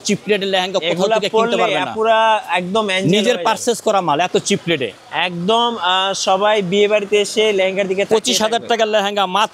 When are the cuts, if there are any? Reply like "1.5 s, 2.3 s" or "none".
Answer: none